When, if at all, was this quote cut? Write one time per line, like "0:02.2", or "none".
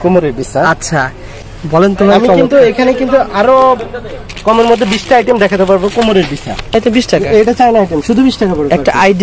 0:01.3
0:06.8